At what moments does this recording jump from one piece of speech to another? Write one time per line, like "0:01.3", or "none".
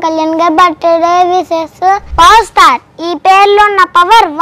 0:02.1